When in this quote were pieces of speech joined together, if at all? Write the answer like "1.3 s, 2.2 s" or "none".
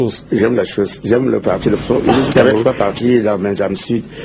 2.3 s